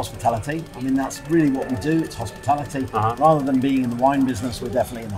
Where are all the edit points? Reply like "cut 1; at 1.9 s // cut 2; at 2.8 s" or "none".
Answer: none